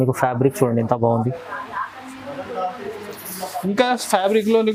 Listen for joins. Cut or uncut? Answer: uncut